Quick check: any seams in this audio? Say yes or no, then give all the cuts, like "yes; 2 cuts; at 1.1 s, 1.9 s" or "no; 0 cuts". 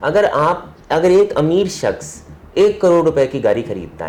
no; 0 cuts